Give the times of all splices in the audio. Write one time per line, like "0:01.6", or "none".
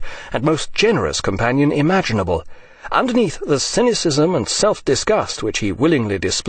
0:04.8